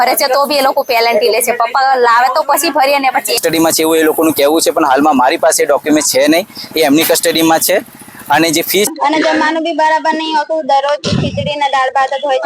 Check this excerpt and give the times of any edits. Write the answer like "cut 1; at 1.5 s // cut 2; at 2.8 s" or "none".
cut 1; at 3.4 s // cut 2; at 8.9 s

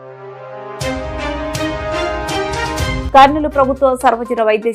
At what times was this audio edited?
cut 1; at 3.0 s

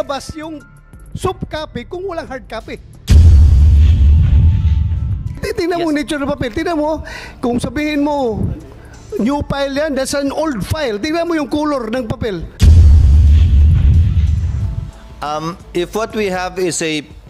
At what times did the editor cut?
cut 1; at 2.9 s // cut 2; at 12.5 s // cut 3; at 14.7 s

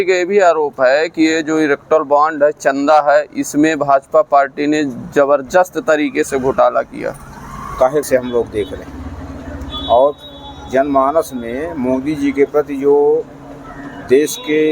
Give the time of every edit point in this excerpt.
cut 1; at 8.0 s

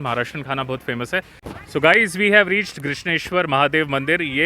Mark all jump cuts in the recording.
cut 1; at 1.4 s

